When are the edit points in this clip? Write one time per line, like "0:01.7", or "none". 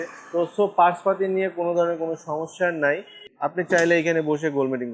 0:03.2